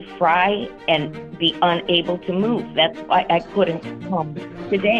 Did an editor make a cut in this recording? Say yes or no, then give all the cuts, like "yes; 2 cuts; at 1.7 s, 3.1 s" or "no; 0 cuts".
yes; 1 cut; at 3.9 s